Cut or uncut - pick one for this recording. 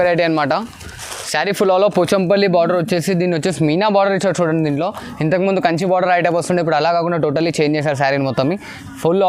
uncut